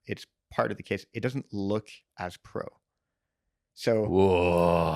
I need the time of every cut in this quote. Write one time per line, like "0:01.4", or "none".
none